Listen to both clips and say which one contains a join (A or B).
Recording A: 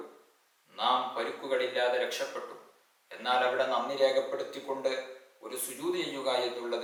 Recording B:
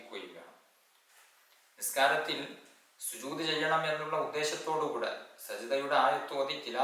B